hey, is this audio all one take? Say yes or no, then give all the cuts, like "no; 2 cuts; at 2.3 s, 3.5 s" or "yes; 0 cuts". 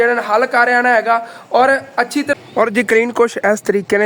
no; 1 cut; at 2.3 s